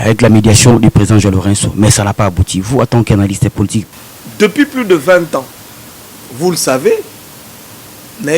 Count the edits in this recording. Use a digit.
1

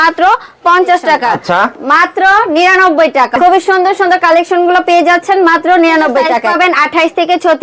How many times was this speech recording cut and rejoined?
3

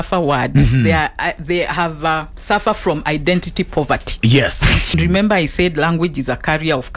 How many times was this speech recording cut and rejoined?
1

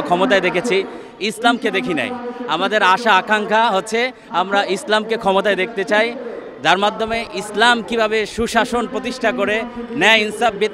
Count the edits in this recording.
0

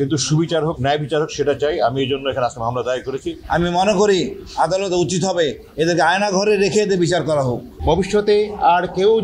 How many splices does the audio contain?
2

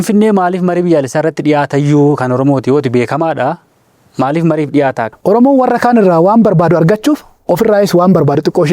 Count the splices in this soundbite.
1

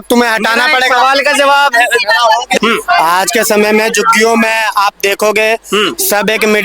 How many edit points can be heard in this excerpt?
1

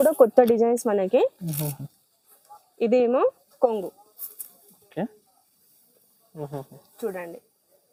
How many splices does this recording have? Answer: 0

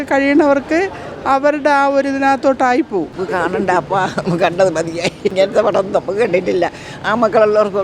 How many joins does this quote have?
2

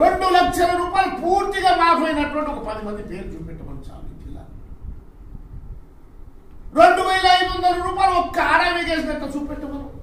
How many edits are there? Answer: 0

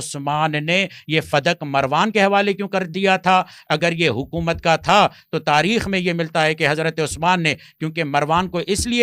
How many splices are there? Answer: 0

